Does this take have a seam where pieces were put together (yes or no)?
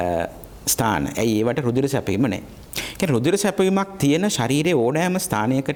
no